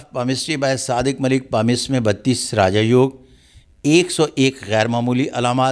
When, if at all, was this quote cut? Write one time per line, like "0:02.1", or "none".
none